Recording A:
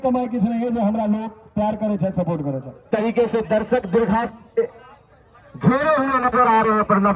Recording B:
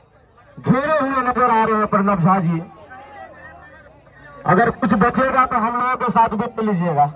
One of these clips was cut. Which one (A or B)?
A